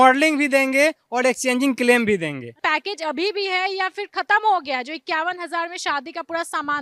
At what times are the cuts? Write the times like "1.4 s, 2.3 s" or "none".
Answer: 2.5 s